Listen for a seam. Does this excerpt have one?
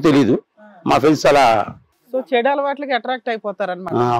no; 0 cuts

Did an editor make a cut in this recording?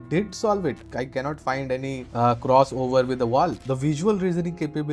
yes; 3 cuts; at 0.8 s, 2.0 s, 3.6 s

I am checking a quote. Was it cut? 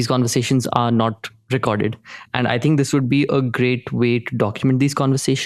no; 0 cuts

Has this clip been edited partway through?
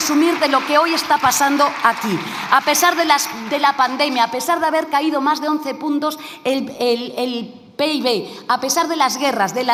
no; 0 cuts

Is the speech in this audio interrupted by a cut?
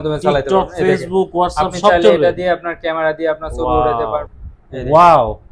yes; 1 cut; at 4.4 s

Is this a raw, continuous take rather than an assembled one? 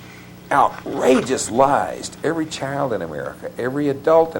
yes; 0 cuts

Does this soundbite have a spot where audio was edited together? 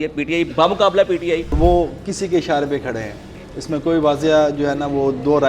yes; 1 cut; at 1.6 s

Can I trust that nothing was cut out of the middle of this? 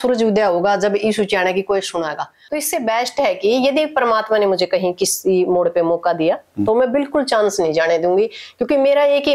no; 1 cut; at 2.4 s

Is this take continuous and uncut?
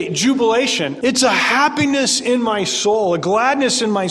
no; 1 cut; at 0.9 s

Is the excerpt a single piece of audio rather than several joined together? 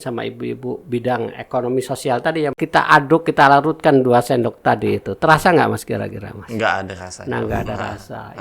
no; 1 cut; at 2.6 s

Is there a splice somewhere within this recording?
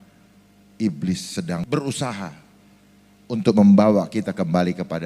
yes; 1 cut; at 1.6 s

